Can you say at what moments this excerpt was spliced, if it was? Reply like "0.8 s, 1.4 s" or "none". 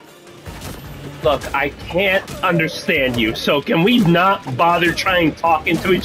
none